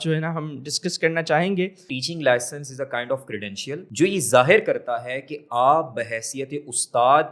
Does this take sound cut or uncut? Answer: cut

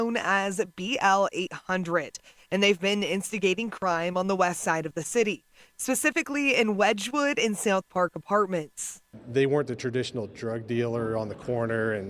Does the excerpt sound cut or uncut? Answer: uncut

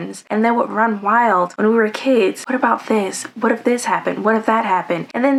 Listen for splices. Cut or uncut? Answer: uncut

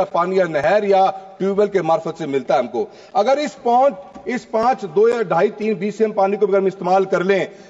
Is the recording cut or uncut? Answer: uncut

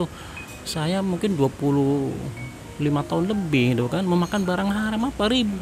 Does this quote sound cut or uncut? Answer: uncut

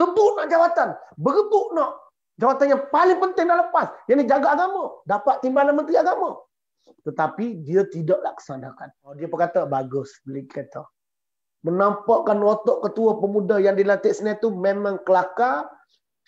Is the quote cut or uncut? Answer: cut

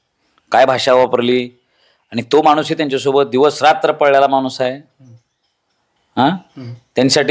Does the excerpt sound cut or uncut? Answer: uncut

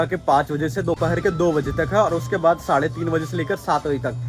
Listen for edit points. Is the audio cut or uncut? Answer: uncut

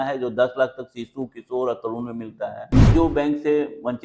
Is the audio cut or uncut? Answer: cut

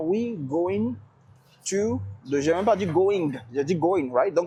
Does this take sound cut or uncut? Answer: uncut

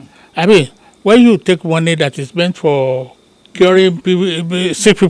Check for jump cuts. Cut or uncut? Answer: uncut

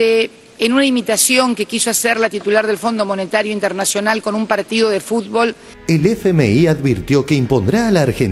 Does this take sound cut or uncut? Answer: cut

